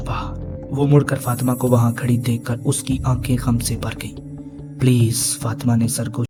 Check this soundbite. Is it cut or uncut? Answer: uncut